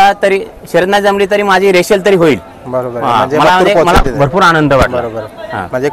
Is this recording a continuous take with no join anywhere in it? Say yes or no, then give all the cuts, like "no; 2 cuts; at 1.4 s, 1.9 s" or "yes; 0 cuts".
yes; 0 cuts